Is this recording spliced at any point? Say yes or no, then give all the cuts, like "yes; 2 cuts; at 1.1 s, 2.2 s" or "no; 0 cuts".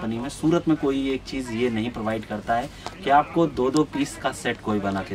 no; 0 cuts